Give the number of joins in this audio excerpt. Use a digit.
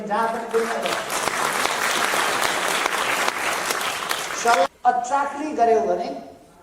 1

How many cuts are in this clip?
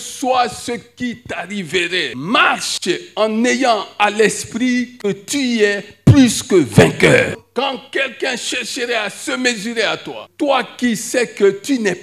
3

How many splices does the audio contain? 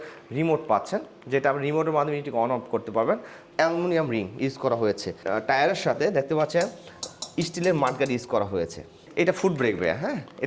3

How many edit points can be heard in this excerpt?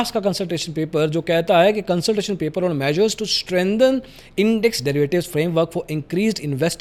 0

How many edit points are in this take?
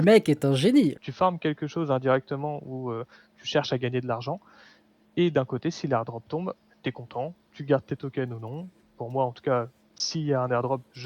1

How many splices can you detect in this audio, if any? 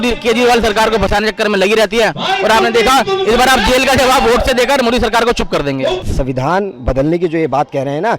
1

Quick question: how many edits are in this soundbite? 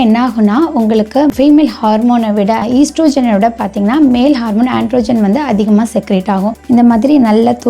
2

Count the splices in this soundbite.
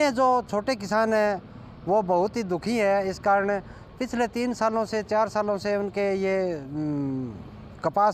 0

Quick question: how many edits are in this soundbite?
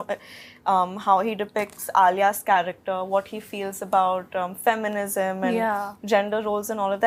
0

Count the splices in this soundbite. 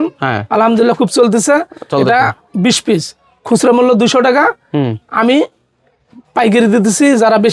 0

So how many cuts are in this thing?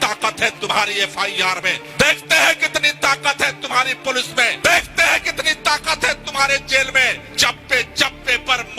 3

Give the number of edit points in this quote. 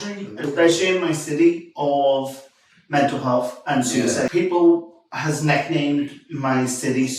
1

